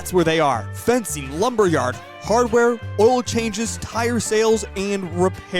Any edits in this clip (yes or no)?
yes